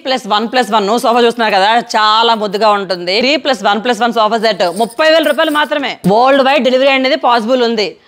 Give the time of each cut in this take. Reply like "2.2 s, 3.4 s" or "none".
3.2 s, 5.9 s